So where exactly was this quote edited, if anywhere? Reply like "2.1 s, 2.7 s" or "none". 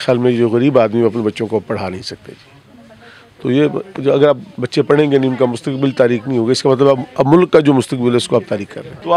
none